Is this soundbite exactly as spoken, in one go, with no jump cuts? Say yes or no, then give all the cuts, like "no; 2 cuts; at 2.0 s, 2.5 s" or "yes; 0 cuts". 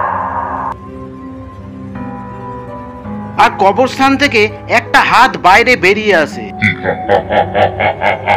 yes; 0 cuts